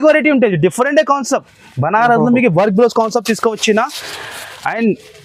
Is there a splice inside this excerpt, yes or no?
no